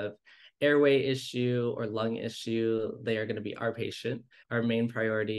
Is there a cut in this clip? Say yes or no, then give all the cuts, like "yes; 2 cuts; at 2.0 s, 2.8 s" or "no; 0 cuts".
yes; 1 cut; at 4.3 s